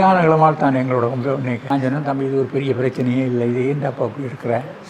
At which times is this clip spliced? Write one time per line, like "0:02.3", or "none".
0:01.6

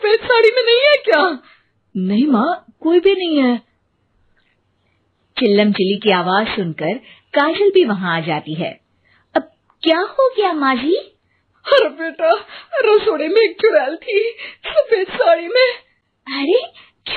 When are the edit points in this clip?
none

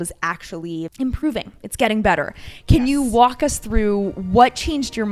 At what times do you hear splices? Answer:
0:00.9

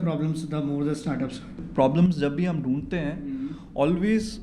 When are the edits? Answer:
0:01.6

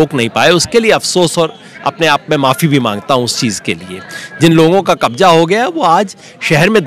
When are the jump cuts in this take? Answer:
none

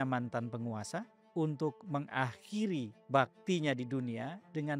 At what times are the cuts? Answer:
0:01.2
0:03.0

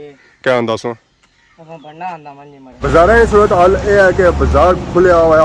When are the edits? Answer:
0:02.7

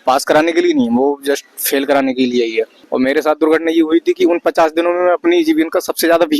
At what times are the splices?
0:02.8

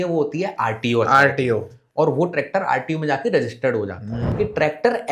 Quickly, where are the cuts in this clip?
0:04.2

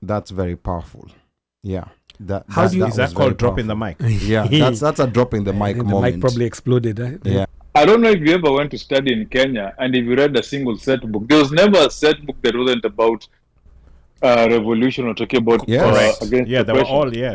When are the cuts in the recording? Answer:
0:07.5

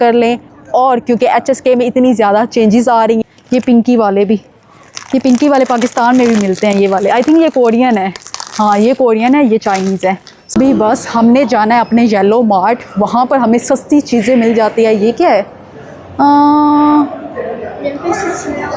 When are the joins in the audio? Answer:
0:03.2
0:10.4

